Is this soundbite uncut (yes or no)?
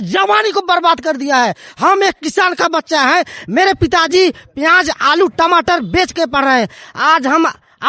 yes